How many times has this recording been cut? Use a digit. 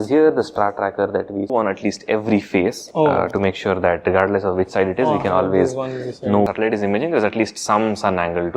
2